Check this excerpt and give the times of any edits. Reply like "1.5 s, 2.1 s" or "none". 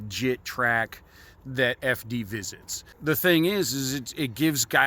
3.0 s